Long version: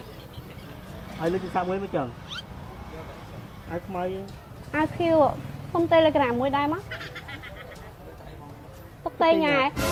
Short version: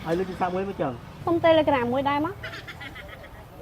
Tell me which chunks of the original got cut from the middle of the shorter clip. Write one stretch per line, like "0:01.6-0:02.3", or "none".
0:02.2-0:05.5